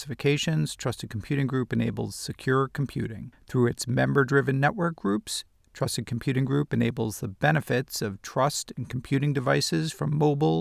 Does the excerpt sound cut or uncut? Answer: uncut